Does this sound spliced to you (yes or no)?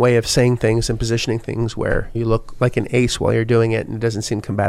yes